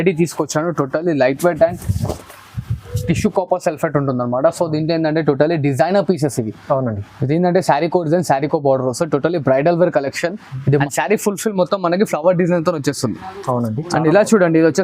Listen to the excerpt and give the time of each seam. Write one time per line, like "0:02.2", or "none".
0:10.8